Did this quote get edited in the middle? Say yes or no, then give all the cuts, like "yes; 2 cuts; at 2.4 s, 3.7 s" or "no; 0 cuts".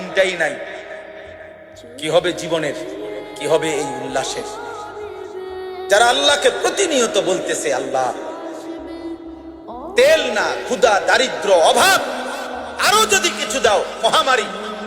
yes; 2 cuts; at 4.5 s, 5.9 s